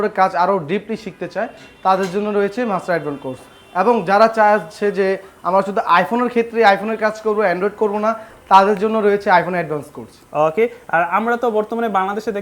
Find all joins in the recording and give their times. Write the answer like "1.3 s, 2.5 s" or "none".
none